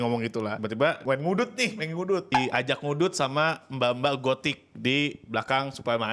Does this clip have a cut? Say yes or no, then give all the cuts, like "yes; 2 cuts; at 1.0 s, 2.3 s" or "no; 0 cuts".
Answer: yes; 2 cuts; at 0.7 s, 2.3 s